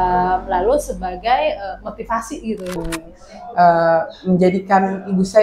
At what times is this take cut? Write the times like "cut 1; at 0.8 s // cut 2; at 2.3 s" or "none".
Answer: cut 1; at 2.8 s

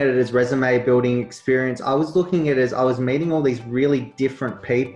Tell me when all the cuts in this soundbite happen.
none

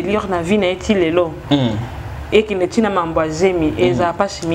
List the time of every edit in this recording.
none

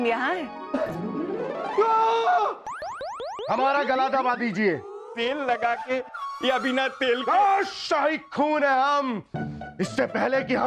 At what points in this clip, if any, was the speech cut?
cut 1; at 3.2 s

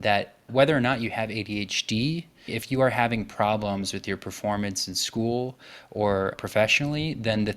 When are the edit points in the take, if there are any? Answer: cut 1; at 6.4 s

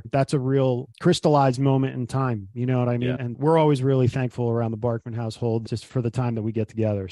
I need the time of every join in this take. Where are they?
cut 1; at 3.3 s // cut 2; at 5.9 s

